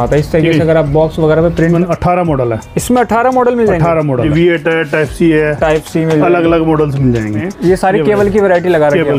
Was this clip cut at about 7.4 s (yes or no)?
yes